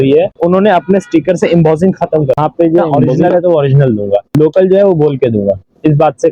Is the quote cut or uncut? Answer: cut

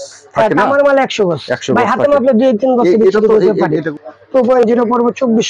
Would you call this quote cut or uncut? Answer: cut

